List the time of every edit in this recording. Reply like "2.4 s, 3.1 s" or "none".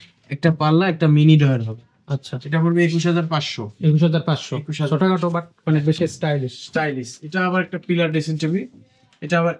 none